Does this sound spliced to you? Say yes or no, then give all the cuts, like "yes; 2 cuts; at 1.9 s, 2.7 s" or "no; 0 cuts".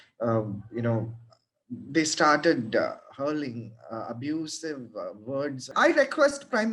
yes; 1 cut; at 5.7 s